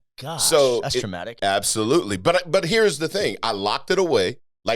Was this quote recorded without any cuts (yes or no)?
no